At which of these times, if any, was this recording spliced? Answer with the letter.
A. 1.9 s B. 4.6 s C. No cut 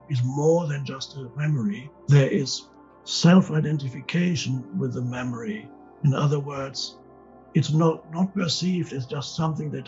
A